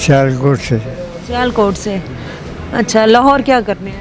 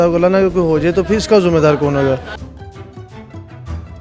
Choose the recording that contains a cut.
second; 1 cut; at 2.4 s

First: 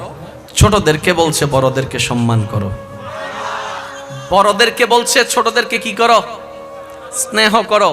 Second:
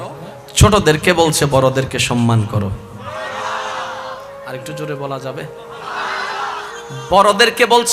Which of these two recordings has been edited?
first; 1 cut; at 3.8 s

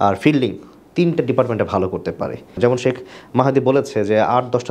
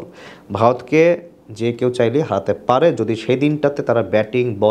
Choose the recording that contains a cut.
first; 1 cut; at 2.6 s

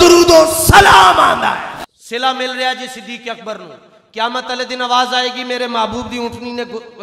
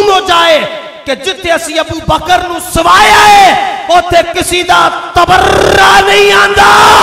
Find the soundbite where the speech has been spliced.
first; 1 cut; at 1.8 s

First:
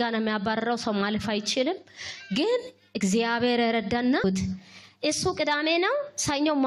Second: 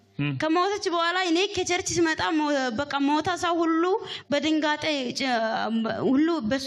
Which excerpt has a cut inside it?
first; 1 cut; at 4.2 s

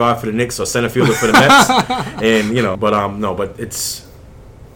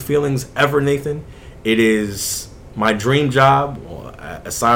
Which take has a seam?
first; 1 cut; at 2.8 s

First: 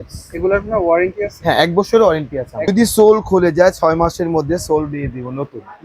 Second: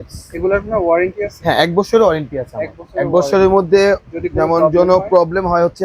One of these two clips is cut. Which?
first; 1 cut; at 2.7 s

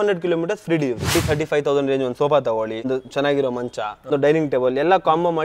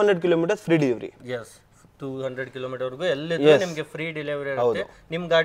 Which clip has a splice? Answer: first; 3 cuts; at 1.1 s, 2.9 s, 4.1 s

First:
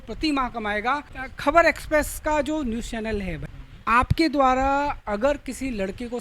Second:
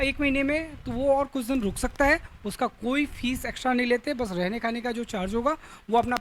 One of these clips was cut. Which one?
first; 2 cuts; at 1.2 s, 3.4 s

